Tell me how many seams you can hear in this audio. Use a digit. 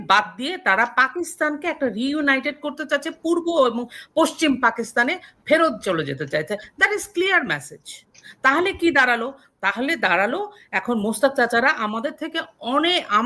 0